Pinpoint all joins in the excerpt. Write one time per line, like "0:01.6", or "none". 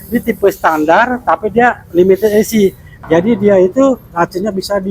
0:02.9